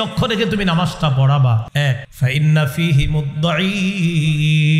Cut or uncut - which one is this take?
cut